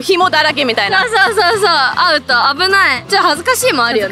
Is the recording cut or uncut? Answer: uncut